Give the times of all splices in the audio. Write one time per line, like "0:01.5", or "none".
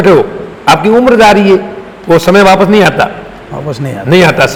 none